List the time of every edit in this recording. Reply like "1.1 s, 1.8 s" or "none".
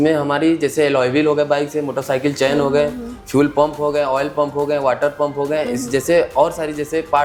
none